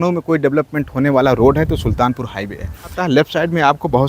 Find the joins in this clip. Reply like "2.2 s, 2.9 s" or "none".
3.0 s